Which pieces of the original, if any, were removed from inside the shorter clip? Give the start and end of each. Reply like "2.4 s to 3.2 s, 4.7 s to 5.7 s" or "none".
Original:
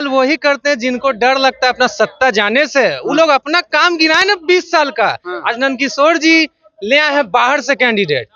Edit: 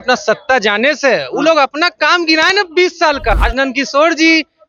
5.1 s to 5.4 s